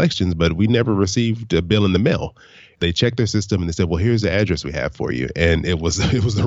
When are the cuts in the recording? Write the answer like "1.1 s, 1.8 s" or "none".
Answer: 2.8 s

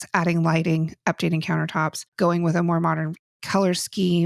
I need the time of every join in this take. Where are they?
2.1 s

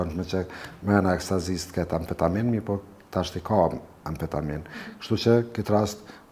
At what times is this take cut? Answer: none

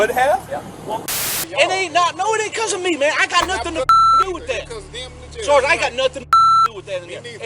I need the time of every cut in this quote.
1.1 s

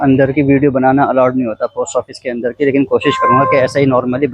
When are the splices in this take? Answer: none

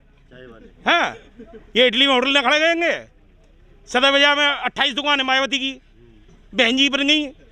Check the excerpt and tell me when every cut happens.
none

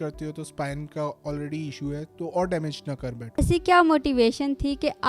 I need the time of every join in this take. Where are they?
3.4 s

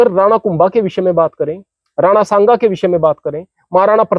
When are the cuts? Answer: none

